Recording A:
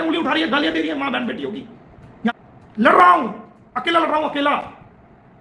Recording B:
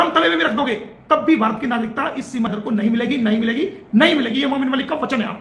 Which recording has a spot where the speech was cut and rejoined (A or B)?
A